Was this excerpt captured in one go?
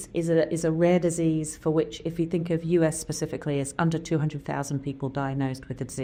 yes; 0 cuts

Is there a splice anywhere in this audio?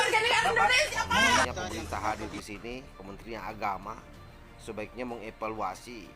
yes; 1 cut; at 1.4 s

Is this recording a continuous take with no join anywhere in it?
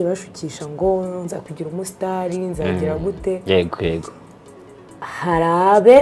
yes; 0 cuts

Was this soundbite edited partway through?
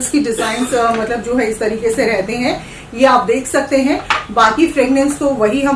no; 0 cuts

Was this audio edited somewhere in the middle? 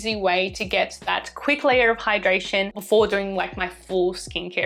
no; 0 cuts

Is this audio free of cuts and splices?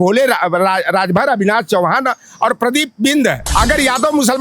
no; 1 cut; at 3.4 s

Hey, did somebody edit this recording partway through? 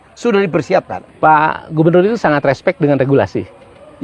yes; 1 cut; at 1.0 s

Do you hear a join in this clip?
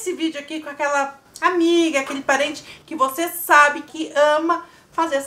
yes; 1 cut; at 3.9 s

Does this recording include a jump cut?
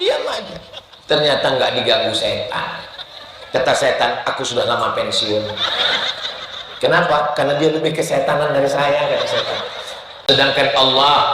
yes; 1 cut; at 10.2 s

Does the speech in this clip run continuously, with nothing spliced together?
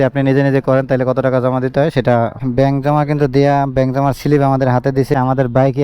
no; 2 cuts; at 2.3 s, 5.1 s

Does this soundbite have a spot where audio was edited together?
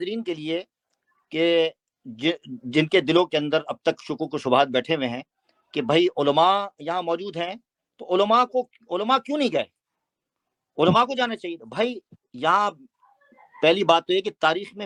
no; 0 cuts

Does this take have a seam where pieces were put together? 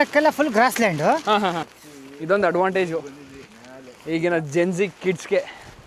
yes; 1 cut; at 1.7 s

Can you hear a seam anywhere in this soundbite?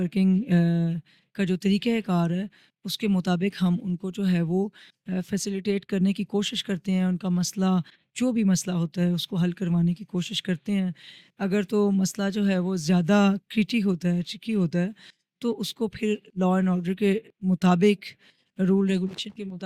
no; 0 cuts

